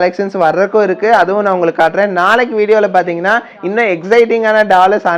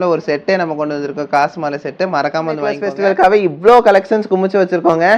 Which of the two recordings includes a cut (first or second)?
second